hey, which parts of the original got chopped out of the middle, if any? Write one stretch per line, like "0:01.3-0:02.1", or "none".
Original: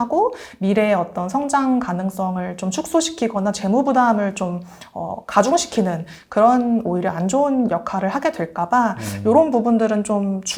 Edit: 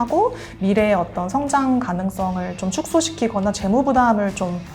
none